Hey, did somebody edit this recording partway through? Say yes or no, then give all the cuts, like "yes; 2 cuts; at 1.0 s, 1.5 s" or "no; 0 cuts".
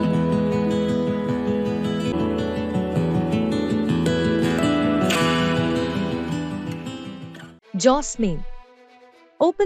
no; 0 cuts